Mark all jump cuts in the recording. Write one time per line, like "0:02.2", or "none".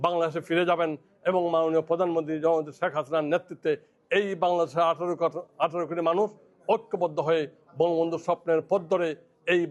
none